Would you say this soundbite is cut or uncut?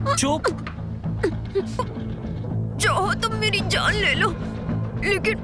cut